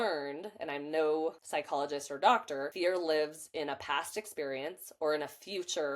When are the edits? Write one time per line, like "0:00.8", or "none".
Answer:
0:01.4
0:02.7